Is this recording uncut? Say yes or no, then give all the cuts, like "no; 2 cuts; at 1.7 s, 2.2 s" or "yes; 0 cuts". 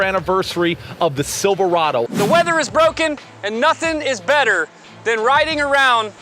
no; 1 cut; at 2.1 s